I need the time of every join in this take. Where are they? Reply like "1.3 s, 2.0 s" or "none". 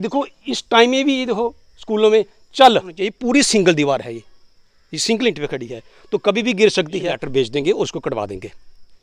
3.1 s, 7.2 s